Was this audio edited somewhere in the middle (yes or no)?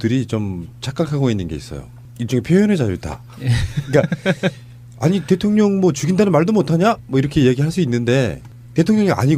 no